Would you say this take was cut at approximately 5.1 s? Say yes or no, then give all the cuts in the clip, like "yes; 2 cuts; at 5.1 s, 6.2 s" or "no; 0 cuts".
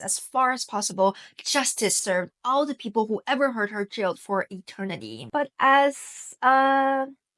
yes; 1 cut; at 5.1 s